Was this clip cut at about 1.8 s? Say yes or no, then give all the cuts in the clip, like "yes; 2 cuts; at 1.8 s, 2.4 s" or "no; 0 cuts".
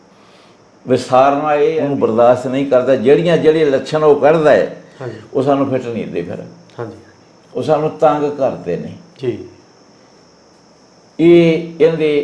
yes; 1 cut; at 1.8 s